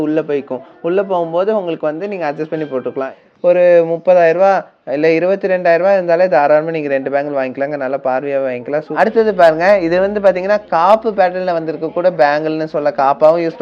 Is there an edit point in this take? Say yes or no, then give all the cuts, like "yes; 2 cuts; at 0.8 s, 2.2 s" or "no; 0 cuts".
yes; 2 cuts; at 3.1 s, 9.0 s